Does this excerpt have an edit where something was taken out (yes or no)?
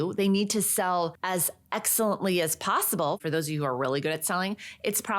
yes